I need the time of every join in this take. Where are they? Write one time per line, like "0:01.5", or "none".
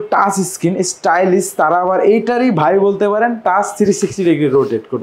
none